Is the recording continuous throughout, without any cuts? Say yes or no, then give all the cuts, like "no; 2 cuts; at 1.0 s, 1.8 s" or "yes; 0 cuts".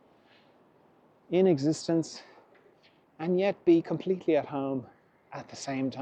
yes; 0 cuts